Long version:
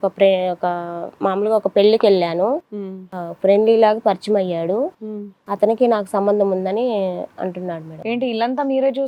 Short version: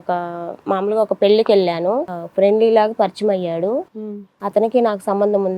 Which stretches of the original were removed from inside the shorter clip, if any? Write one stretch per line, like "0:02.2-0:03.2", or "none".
0:02.7-0:03.2